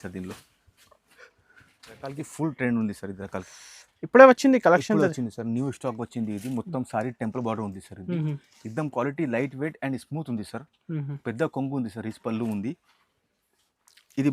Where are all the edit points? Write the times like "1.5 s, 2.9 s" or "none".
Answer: 2.2 s